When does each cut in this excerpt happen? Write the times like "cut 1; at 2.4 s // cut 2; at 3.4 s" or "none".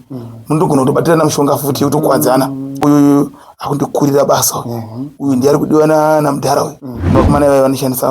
cut 1; at 2.8 s // cut 2; at 7.1 s